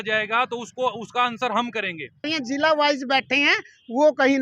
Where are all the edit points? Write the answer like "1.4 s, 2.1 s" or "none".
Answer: 2.3 s